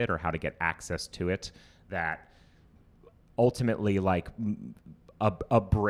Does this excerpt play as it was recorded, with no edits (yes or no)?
yes